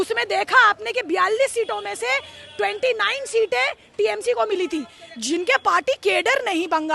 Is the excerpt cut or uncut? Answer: uncut